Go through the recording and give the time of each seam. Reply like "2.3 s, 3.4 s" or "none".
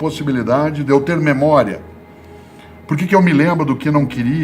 none